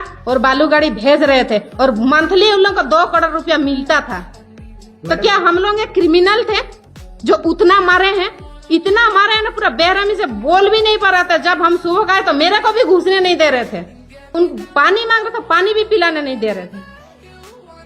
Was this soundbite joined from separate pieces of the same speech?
yes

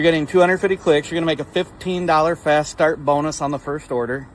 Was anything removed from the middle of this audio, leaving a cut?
yes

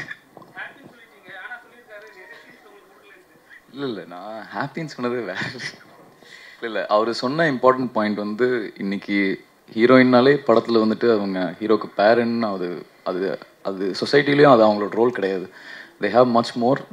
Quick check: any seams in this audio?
no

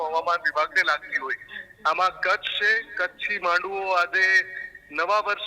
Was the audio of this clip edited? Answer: no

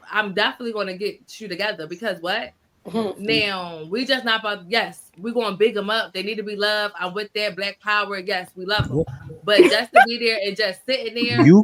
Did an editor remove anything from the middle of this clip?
no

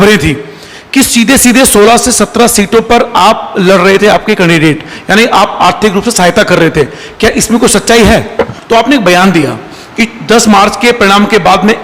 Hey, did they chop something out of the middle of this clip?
yes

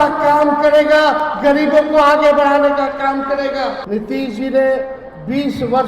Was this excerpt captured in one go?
no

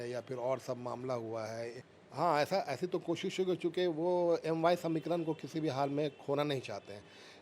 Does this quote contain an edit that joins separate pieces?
yes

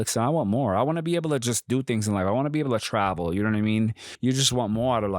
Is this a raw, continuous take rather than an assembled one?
no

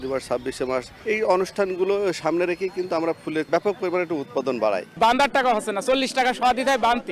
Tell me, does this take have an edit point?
yes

